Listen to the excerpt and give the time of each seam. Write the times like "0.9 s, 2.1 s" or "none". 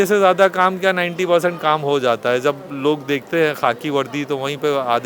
none